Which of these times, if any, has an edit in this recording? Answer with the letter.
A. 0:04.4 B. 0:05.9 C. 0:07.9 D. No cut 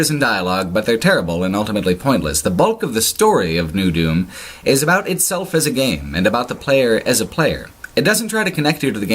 B